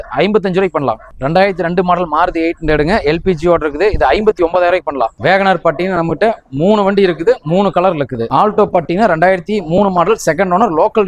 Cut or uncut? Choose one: cut